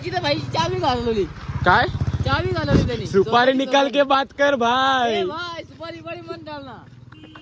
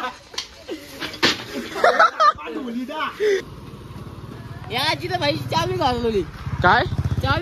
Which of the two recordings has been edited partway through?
second; 1 cut; at 3.5 s

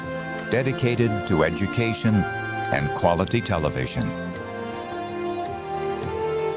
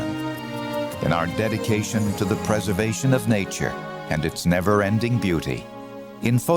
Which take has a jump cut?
first; 1 cut; at 4.1 s

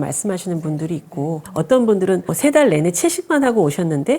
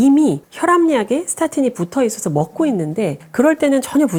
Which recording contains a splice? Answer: first; 1 cut; at 1.5 s

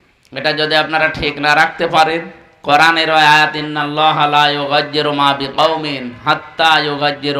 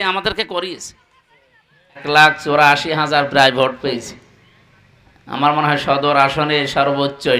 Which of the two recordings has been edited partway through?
second; 1 cut; at 2.0 s

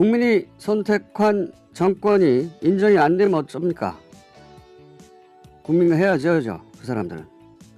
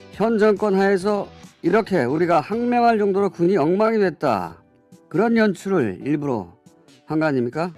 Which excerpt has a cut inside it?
first; 1 cut; at 2.6 s

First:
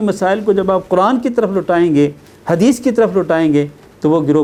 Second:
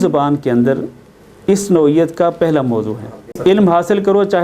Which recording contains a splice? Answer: second; 1 cut; at 3.4 s

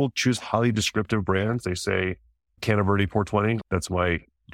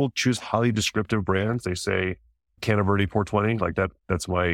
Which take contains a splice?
first; 1 cut; at 3.6 s

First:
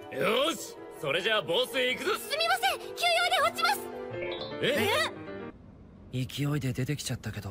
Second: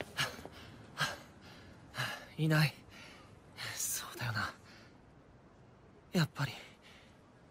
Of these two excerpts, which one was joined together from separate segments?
first; 1 cut; at 5.3 s

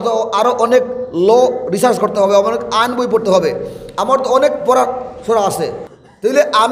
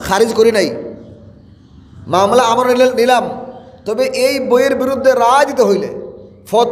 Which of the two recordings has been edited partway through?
first; 1 cut; at 5.8 s

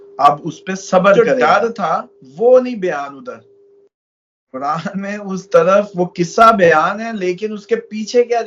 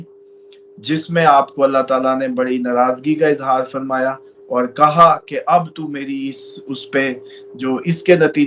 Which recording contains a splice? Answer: first; 1 cut; at 1.2 s

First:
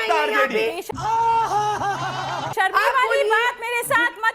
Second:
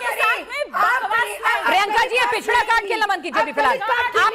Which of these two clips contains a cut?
first; 1 cut; at 2.5 s

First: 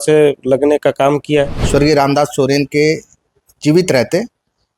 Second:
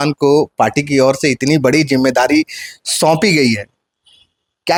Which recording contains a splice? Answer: first; 1 cut; at 1.6 s

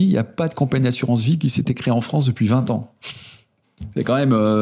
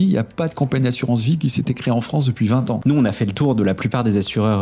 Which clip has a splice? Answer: second; 1 cut; at 2.8 s

